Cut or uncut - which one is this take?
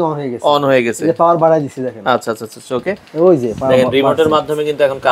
uncut